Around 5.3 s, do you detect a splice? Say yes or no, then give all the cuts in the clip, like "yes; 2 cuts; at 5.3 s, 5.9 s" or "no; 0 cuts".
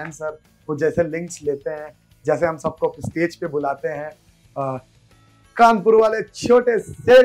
no; 0 cuts